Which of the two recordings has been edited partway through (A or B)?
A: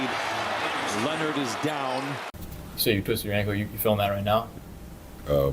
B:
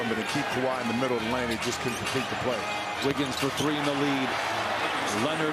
A